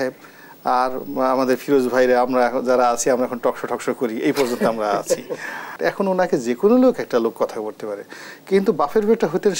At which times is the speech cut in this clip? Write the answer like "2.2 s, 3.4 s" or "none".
5.7 s

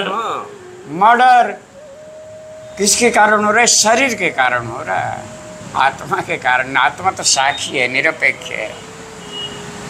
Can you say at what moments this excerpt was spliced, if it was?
none

